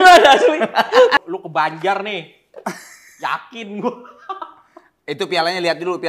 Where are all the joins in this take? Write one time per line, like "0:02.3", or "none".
0:01.1